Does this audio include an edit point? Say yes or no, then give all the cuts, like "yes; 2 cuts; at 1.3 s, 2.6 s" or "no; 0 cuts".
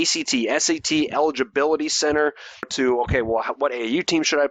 yes; 1 cut; at 2.7 s